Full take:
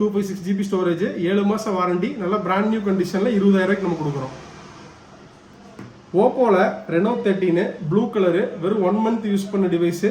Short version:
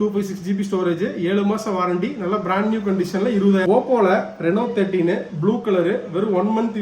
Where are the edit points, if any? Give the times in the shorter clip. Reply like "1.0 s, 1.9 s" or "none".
3.7 s